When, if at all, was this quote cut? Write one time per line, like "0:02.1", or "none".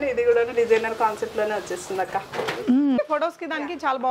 0:03.0

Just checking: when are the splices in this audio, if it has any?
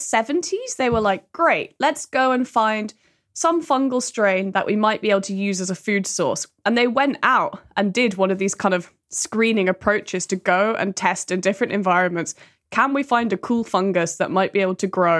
none

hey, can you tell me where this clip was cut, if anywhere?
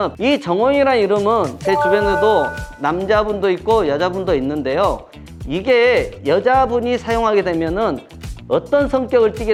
none

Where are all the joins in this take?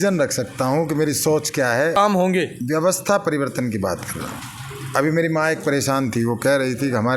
0:02.0

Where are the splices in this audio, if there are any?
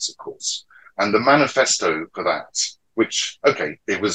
none

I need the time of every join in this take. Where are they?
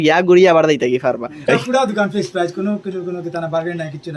0:01.5

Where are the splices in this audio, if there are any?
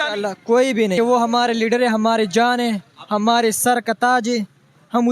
0:00.9

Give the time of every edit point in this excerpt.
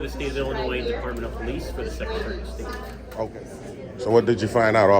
0:03.3

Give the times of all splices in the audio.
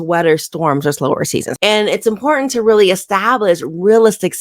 0:01.5

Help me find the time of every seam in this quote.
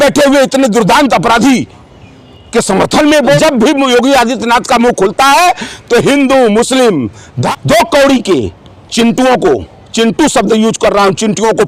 0:03.4
0:07.3

